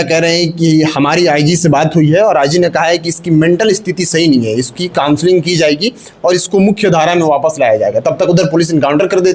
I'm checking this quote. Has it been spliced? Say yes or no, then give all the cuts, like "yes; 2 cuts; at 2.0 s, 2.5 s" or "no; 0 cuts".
no; 0 cuts